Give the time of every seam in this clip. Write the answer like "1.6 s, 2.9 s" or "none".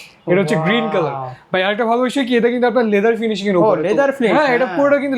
none